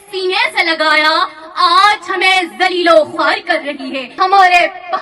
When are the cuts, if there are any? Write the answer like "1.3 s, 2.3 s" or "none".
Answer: 4.0 s